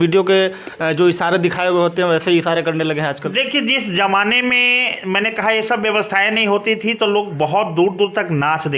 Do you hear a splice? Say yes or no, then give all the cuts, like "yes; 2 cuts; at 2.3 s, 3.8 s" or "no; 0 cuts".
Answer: no; 0 cuts